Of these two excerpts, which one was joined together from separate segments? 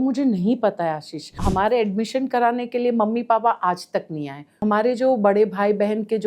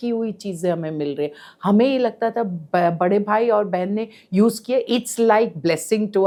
first; 2 cuts; at 1.4 s, 4.6 s

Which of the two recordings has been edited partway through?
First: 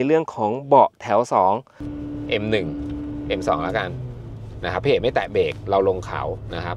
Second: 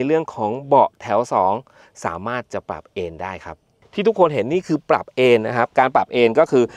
first; 1 cut; at 1.8 s

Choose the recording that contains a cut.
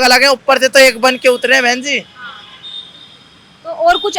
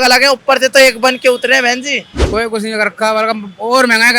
second; 1 cut; at 2.1 s

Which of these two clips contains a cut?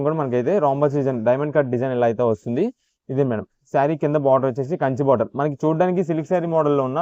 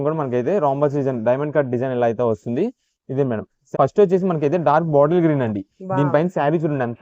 second; 1 cut; at 3.6 s

